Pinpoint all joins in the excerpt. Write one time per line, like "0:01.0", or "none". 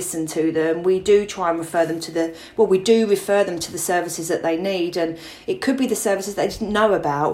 none